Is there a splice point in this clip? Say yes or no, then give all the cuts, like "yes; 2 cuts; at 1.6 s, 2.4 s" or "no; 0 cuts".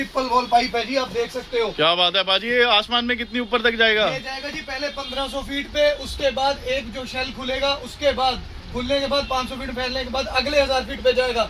no; 0 cuts